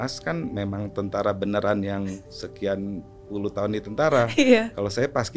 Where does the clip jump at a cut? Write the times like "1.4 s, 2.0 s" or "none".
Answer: none